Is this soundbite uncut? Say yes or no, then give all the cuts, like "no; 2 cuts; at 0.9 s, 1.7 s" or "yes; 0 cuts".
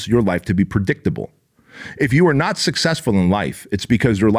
yes; 0 cuts